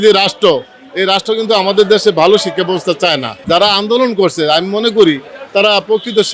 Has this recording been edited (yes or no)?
yes